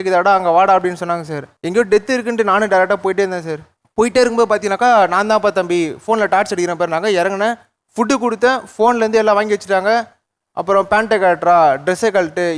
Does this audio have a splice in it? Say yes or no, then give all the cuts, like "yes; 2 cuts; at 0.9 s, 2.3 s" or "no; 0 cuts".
no; 0 cuts